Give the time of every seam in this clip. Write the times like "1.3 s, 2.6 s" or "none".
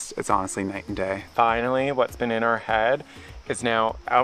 1.3 s